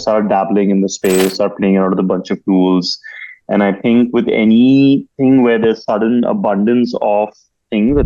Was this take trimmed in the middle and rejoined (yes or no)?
no